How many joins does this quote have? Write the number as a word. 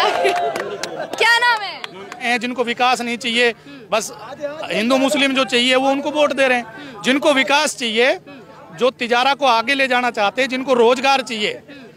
one